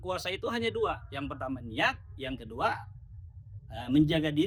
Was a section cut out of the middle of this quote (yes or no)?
no